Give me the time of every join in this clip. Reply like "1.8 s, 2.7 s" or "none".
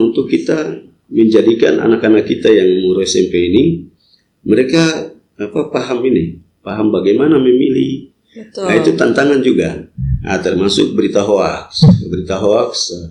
none